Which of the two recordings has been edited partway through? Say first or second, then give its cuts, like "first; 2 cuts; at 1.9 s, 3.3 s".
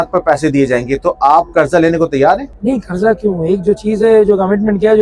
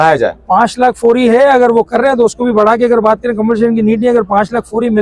first; 1 cut; at 2.5 s